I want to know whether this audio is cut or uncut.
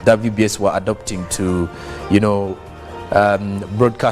cut